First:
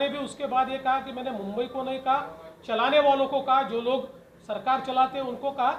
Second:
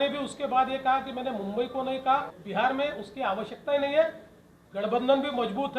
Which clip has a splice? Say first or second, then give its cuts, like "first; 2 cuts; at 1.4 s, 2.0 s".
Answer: second; 1 cut; at 2.4 s